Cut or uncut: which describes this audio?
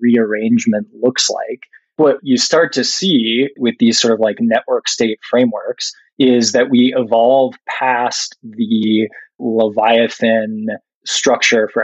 cut